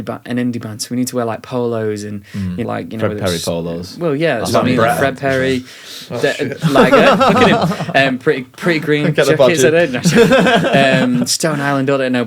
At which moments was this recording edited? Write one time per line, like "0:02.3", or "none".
0:02.6